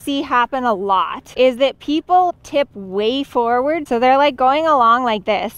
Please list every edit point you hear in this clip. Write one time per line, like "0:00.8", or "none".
0:01.2
0:02.3
0:03.8